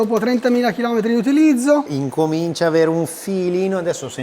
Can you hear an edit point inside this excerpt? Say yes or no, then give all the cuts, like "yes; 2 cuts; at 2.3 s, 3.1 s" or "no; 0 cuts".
yes; 1 cut; at 1.9 s